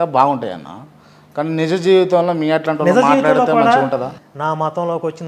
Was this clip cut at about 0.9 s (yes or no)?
no